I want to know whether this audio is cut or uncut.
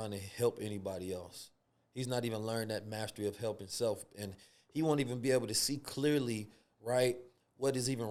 uncut